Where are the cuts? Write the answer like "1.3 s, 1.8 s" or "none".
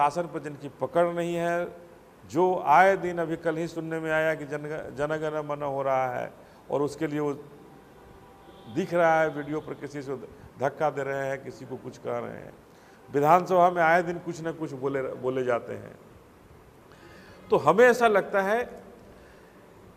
none